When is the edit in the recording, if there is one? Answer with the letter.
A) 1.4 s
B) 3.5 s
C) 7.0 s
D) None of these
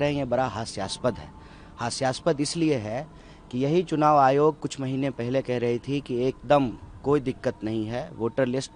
D